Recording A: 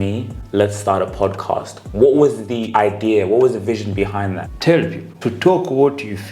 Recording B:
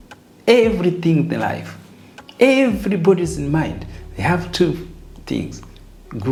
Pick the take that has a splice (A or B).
A